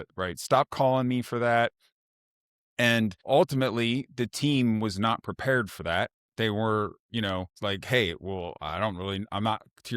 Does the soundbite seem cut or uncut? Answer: cut